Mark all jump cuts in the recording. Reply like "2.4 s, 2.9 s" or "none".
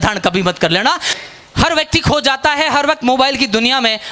1.1 s